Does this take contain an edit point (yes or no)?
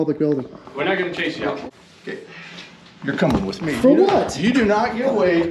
yes